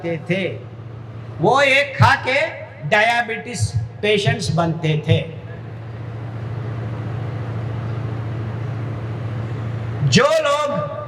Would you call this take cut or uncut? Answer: uncut